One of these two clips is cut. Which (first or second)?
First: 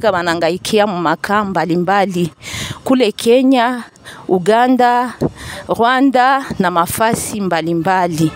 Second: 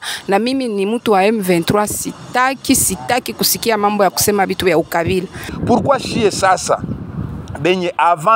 second